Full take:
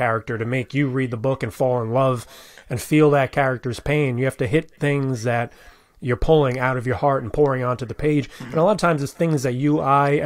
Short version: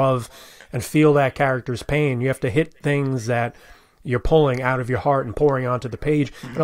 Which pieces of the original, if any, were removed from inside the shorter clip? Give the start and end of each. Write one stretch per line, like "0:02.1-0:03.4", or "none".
none